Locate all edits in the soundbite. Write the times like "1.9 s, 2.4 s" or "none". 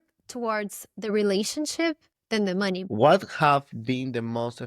2.8 s